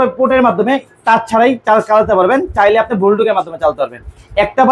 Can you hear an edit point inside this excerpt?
no; 0 cuts

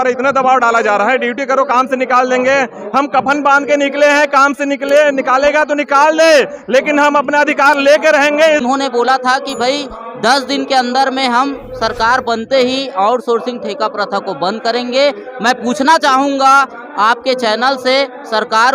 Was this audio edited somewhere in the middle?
yes; 1 cut; at 8.6 s

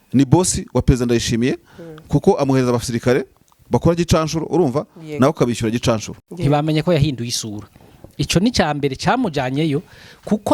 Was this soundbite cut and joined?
yes; 1 cut; at 6.2 s

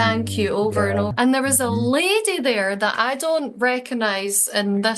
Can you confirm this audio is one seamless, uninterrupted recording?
no; 1 cut; at 1.1 s

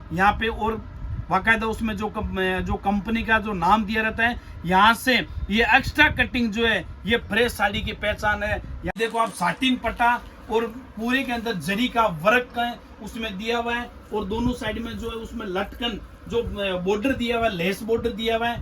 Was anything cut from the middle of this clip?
yes; 1 cut; at 8.9 s

